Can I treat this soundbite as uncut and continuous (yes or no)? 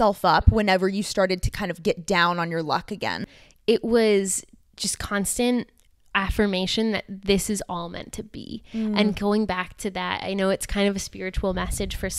no